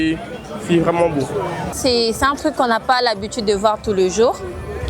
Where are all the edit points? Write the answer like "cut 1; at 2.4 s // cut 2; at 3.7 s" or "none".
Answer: cut 1; at 1.7 s